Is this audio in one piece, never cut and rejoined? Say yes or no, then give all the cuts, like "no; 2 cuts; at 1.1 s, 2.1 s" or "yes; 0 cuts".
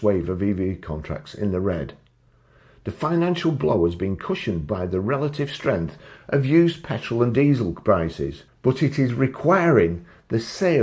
no; 1 cut; at 8.4 s